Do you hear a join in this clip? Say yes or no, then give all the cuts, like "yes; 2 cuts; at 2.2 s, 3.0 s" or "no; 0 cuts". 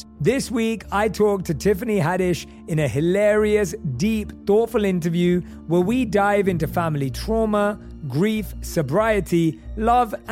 no; 0 cuts